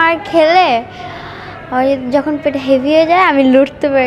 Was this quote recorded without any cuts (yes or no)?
yes